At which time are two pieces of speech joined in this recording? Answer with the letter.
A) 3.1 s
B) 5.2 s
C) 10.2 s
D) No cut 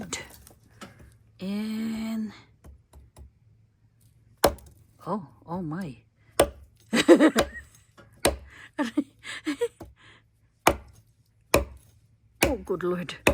D